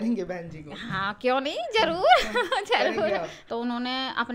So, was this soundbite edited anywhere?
yes; 1 cut; at 3.4 s

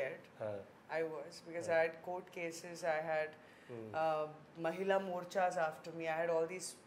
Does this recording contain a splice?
no; 0 cuts

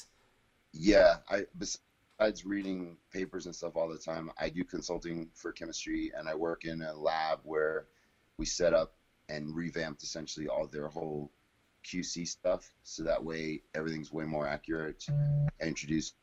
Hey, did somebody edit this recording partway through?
no; 0 cuts

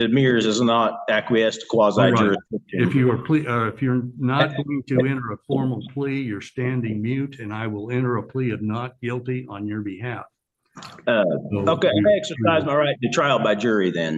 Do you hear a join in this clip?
no; 0 cuts

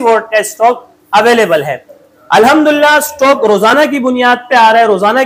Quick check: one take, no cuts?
yes; 0 cuts

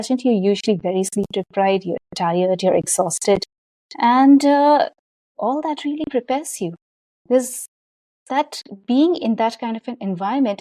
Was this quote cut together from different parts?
no; 0 cuts

